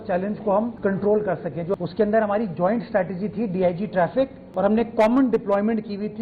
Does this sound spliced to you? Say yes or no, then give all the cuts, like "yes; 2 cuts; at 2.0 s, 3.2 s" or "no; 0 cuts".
yes; 2 cuts; at 1.7 s, 4.4 s